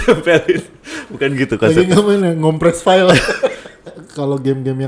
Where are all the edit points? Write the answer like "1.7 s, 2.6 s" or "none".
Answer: 3.9 s